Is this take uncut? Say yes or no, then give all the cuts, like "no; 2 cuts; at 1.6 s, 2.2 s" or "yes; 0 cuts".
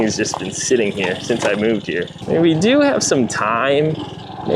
no; 1 cut; at 2.1 s